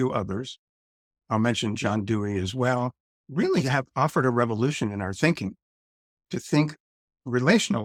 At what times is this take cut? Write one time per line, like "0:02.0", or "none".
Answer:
none